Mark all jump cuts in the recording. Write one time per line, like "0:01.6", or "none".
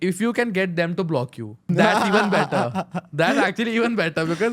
0:01.7